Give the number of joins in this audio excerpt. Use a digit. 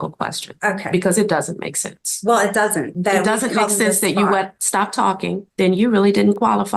2